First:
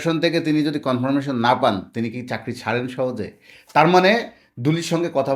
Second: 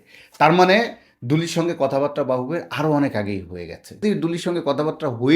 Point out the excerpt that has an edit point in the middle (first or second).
second